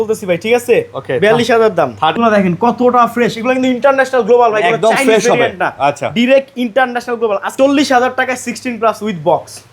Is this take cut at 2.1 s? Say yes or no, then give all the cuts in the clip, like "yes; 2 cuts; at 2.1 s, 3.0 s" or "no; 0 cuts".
yes; 2 cuts; at 2.1 s, 7.5 s